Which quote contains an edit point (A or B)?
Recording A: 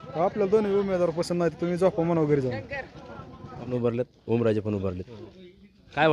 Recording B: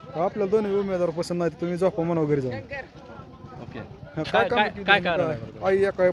A